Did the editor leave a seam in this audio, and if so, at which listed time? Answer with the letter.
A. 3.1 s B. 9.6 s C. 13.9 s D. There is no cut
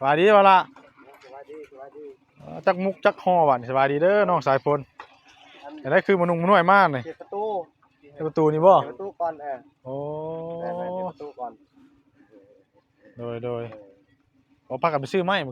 D